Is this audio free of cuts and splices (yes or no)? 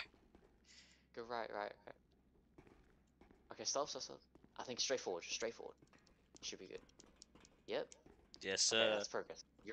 yes